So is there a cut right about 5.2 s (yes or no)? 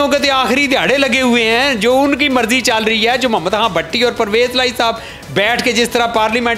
no